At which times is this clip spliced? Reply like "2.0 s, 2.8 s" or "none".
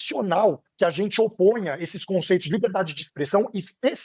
none